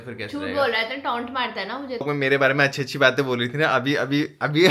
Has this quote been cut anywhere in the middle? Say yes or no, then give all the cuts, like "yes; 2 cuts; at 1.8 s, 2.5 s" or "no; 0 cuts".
yes; 1 cut; at 2.0 s